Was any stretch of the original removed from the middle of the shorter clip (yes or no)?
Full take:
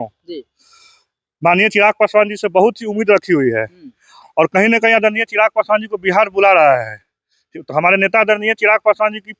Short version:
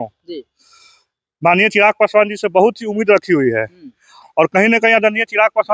no